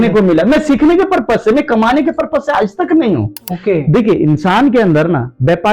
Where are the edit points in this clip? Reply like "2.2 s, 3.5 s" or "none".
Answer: 3.3 s